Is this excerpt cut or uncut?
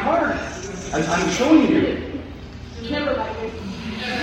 uncut